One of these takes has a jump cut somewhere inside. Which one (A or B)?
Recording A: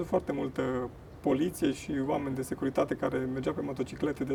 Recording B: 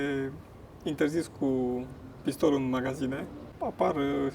B